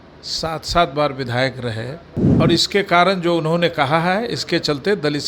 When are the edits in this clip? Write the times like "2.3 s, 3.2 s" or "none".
2.2 s